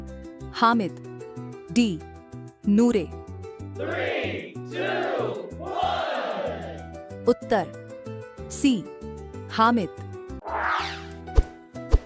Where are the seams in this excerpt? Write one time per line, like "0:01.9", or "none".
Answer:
0:10.4